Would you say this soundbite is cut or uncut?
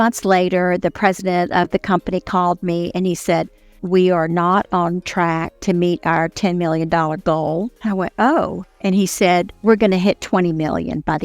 cut